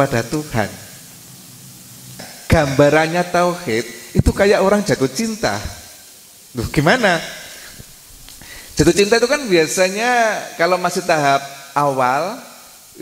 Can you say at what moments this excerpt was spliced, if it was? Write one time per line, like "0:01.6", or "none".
0:02.3